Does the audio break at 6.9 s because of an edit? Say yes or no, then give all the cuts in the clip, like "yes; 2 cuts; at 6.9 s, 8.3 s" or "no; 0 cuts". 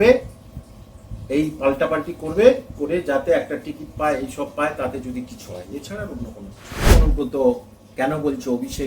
yes; 1 cut; at 6.9 s